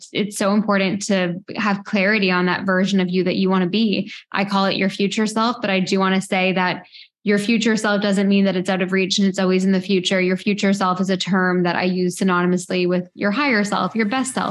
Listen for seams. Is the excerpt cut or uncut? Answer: uncut